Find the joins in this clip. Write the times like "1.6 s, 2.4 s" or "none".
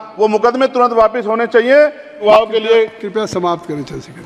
2.1 s